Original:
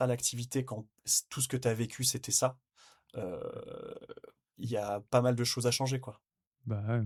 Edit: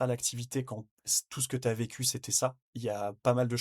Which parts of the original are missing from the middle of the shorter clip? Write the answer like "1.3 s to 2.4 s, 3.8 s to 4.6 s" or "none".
2.7 s to 4.5 s